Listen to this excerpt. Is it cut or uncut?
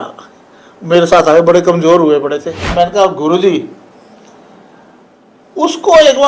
cut